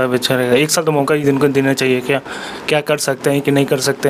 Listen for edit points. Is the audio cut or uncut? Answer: uncut